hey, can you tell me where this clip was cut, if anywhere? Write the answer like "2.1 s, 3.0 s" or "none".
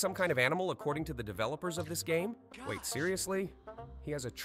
2.5 s